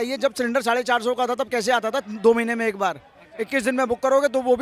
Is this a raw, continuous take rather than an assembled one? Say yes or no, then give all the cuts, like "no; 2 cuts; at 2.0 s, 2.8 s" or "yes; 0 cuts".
yes; 0 cuts